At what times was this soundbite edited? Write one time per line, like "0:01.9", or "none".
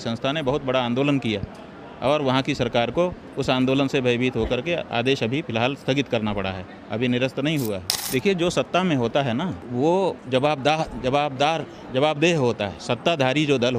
0:07.9
0:09.6
0:10.2
0:12.8